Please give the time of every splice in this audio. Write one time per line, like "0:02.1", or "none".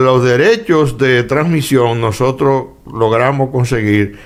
none

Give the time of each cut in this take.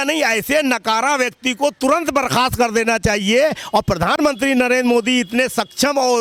none

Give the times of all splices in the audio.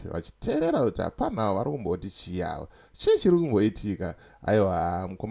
none

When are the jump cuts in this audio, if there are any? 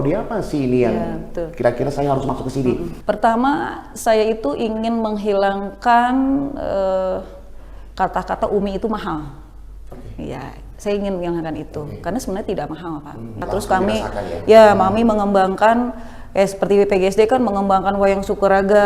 0:02.9
0:13.4

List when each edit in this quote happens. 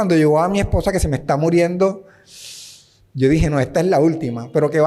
none

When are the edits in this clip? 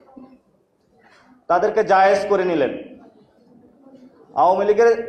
none

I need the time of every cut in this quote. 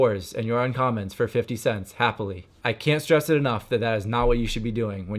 0:02.5

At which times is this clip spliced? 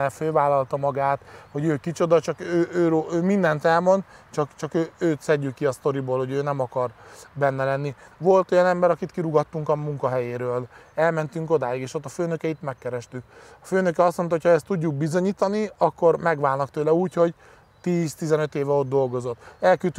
none

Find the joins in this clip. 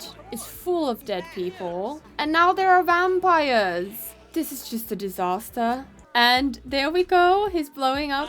0:06.0

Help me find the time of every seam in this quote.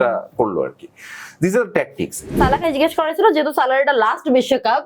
0:02.4

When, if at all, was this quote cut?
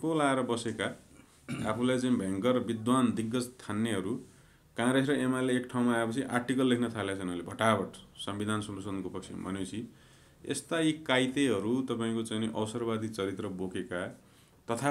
none

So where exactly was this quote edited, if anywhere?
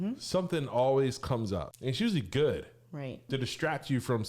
0:01.7
0:03.2

